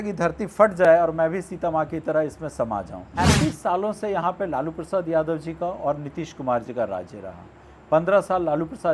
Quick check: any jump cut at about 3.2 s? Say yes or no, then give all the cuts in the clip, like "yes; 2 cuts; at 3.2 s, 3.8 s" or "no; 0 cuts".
yes; 1 cut; at 3.2 s